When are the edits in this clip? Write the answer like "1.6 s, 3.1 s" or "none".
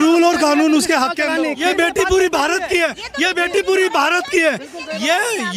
1.6 s